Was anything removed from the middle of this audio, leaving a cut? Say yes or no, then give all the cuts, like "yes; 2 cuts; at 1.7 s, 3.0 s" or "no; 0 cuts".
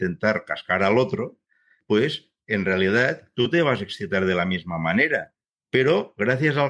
no; 0 cuts